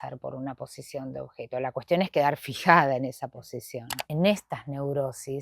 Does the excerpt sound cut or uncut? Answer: cut